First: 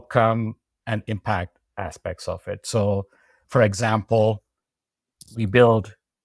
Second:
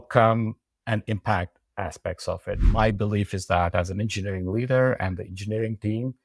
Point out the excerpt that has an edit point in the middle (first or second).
second